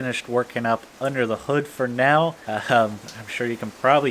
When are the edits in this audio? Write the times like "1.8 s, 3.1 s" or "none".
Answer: 2.4 s